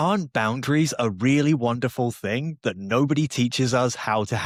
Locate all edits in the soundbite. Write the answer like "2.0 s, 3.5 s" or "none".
none